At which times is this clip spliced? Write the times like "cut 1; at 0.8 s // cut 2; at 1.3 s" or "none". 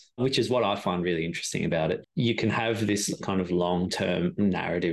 cut 1; at 2.1 s // cut 2; at 3.2 s